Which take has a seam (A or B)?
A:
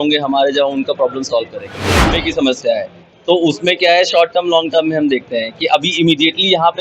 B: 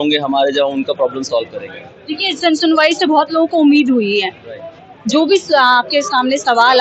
A